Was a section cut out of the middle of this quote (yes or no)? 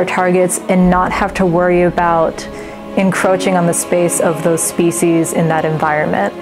no